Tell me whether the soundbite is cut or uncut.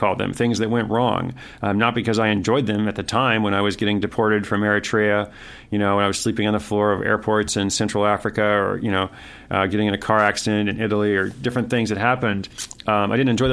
uncut